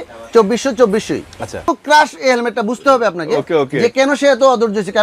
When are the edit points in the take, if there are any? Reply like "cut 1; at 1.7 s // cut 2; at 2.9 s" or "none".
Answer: cut 1; at 1.7 s